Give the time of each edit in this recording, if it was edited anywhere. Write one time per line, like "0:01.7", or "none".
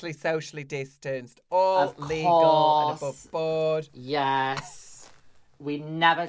none